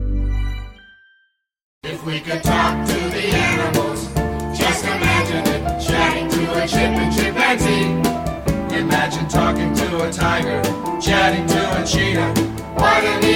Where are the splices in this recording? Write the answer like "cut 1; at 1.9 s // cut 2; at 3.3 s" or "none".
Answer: cut 1; at 1.8 s